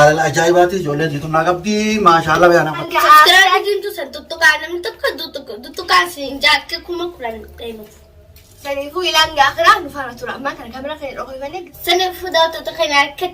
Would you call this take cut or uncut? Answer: cut